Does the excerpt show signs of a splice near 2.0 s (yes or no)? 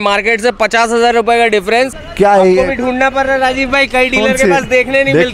yes